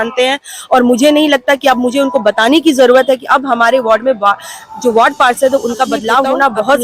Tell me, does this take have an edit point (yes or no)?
no